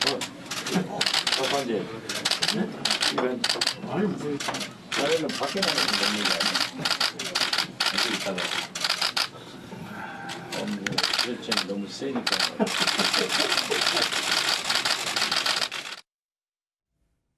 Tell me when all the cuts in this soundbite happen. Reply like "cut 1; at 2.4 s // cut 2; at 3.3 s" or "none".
cut 1; at 11.4 s